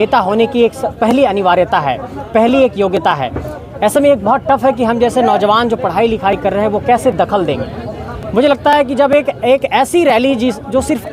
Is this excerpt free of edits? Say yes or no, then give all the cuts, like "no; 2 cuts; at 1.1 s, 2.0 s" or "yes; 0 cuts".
yes; 0 cuts